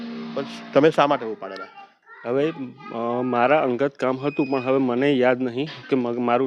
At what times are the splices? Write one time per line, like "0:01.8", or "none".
none

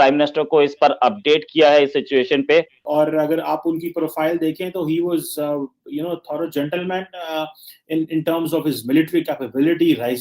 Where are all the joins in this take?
0:02.9

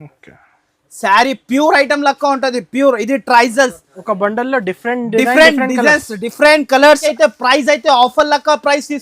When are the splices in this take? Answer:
0:07.1

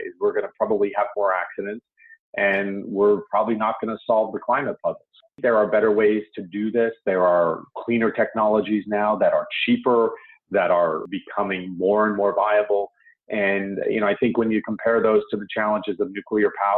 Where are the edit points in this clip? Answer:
0:05.4

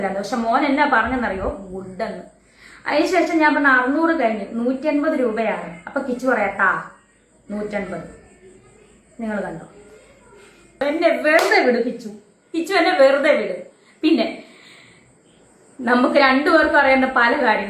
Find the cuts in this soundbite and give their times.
0:10.8

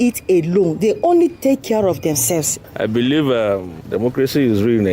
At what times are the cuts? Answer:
0:02.5

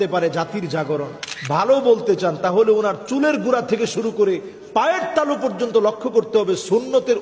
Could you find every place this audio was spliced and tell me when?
0:01.2

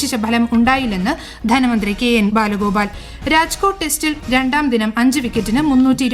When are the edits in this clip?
none

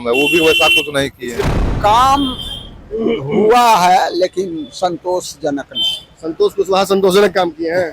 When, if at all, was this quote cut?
0:01.4

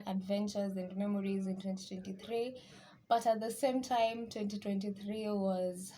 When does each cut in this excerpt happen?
none

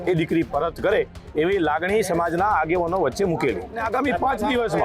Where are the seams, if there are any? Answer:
0:03.8

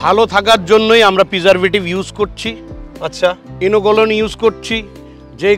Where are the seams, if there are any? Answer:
none

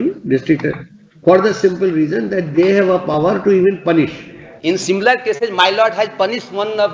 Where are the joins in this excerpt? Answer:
none

